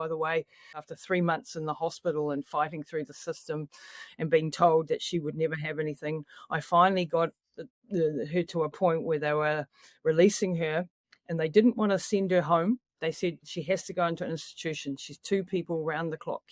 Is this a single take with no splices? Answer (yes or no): no